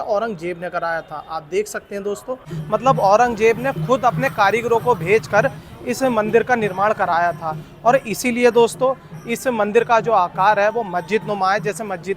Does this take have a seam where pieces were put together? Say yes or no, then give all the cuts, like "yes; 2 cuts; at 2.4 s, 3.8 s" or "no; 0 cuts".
yes; 1 cut; at 2.5 s